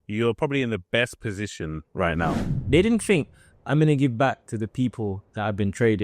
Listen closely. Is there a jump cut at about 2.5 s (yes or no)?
yes